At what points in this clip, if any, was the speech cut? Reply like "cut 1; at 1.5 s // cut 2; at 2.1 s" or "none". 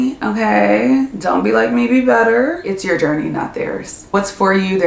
cut 1; at 2.6 s // cut 2; at 4.0 s